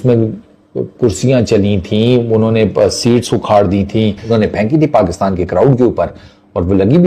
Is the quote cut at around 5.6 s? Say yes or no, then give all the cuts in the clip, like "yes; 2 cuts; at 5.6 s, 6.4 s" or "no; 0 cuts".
no; 1 cut; at 4.2 s